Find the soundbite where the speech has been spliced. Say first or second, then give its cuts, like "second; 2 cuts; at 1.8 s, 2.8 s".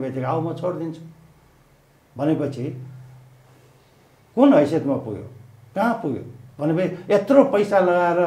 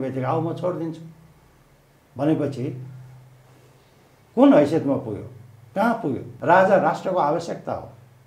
second; 1 cut; at 6.3 s